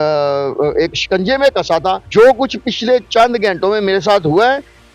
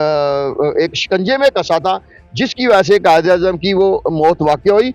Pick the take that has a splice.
first; 1 cut; at 2.0 s

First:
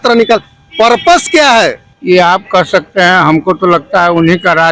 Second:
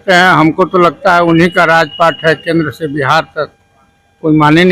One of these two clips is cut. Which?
first; 1 cut; at 1.9 s

